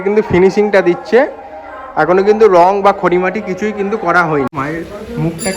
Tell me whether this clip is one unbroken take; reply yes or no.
no